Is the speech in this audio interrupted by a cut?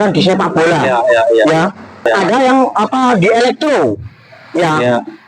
yes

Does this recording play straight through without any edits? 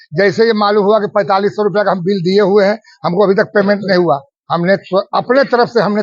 yes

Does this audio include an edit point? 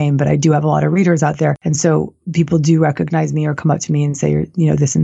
yes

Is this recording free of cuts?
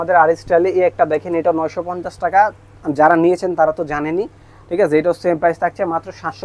yes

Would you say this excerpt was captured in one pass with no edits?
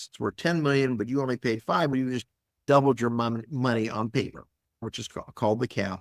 no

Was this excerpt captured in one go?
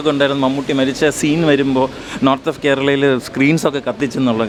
yes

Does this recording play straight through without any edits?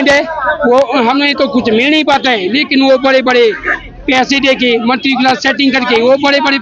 yes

